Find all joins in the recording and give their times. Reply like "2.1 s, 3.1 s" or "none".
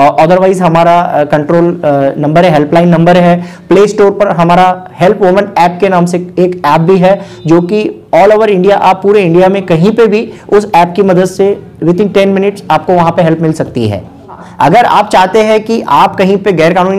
14.5 s